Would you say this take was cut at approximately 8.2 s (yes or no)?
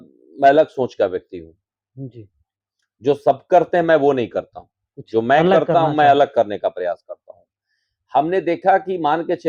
no